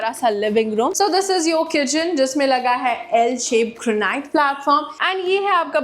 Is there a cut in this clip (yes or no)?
yes